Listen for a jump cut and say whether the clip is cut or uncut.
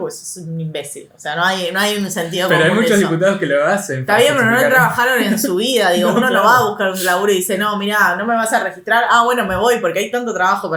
uncut